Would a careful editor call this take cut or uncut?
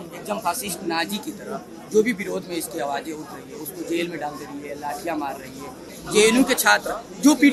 uncut